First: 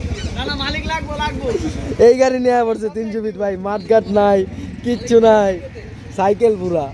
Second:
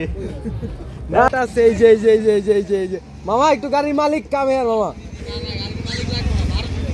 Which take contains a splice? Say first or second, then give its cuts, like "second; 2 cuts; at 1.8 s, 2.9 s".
second; 1 cut; at 1.3 s